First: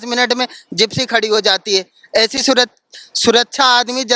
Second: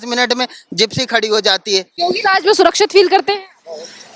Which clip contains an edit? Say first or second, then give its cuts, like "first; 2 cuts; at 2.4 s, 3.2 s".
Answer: second; 1 cut; at 2.0 s